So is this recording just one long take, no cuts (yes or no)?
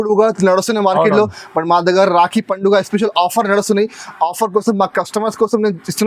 yes